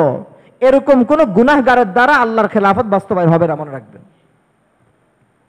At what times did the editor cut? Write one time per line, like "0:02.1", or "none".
none